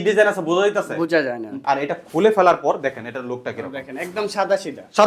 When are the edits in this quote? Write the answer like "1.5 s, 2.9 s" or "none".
1.6 s